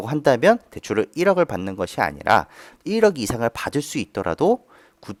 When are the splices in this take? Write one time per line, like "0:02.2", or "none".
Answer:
none